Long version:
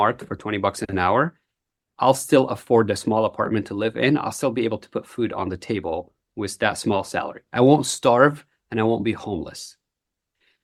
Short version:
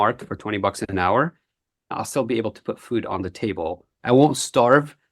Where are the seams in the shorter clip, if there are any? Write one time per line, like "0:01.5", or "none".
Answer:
0:01.9
0:03.9

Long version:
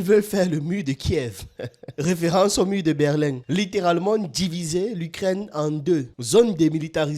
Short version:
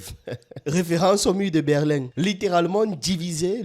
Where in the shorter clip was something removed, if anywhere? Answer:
none

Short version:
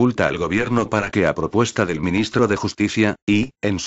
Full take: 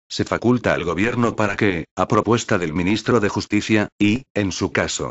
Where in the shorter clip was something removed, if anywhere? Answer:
0:01.5

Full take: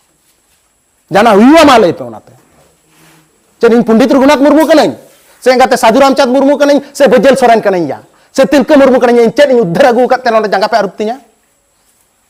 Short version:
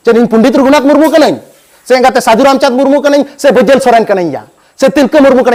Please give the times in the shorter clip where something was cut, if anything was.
none

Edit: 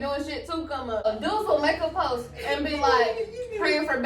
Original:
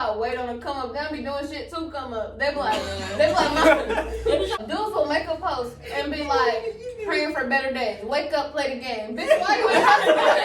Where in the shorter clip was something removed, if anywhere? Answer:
0:01.1

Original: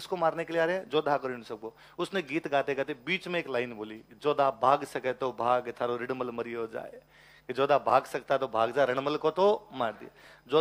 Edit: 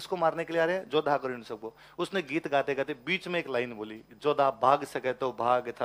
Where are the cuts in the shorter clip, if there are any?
none

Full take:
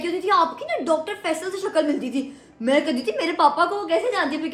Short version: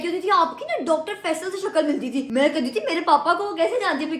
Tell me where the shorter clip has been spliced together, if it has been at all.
0:02.3

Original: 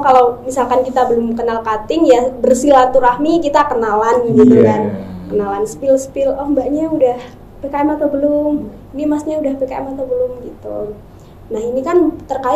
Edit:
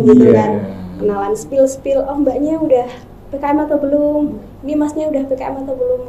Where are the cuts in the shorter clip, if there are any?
none

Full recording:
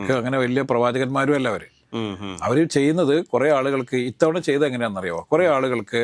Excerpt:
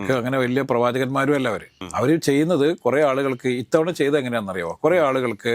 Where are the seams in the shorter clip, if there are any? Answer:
0:01.8

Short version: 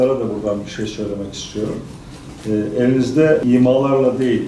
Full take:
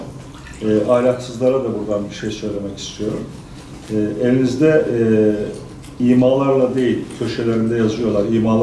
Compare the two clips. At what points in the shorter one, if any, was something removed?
0:03.4

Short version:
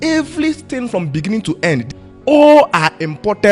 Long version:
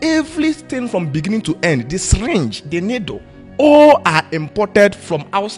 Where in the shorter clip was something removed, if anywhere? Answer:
0:02.0

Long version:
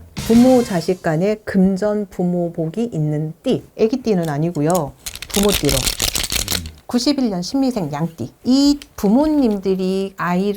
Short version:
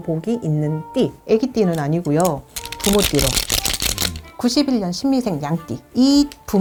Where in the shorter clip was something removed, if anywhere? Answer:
none

